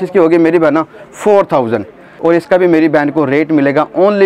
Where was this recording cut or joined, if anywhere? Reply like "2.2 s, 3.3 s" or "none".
2.1 s